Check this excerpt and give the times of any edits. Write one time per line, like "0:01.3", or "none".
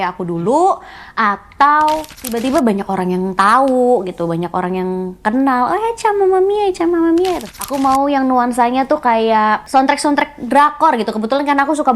0:02.4
0:07.5
0:09.6